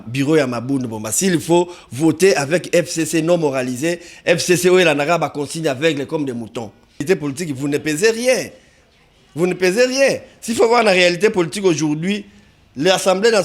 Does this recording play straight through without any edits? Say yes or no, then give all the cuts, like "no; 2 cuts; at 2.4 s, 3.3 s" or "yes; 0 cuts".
no; 1 cut; at 7.0 s